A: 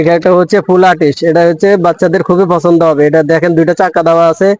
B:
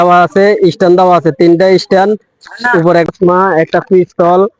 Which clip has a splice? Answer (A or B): B